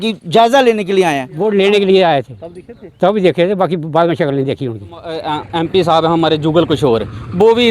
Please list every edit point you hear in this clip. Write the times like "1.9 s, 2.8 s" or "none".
1.3 s, 5.2 s